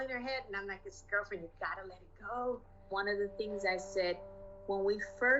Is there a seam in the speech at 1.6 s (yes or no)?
no